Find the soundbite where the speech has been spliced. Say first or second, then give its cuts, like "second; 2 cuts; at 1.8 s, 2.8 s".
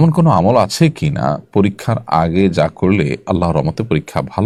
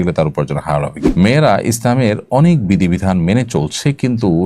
second; 1 cut; at 0.9 s